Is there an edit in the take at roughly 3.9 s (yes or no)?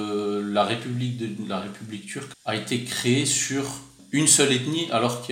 yes